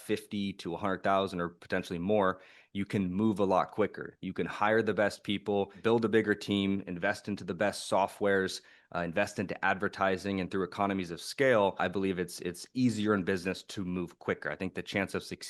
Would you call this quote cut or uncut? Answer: cut